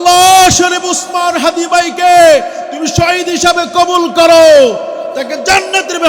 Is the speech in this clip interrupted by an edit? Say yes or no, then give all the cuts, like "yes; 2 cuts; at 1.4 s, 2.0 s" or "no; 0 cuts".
no; 0 cuts